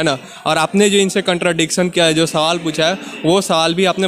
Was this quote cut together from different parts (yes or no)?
no